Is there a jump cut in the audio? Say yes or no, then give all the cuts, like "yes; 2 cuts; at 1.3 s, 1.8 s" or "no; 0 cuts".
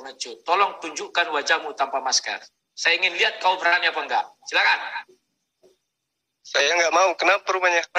no; 0 cuts